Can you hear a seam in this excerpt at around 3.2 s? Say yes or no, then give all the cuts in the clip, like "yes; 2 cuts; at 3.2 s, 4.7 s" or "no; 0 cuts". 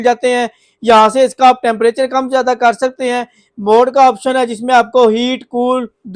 no; 0 cuts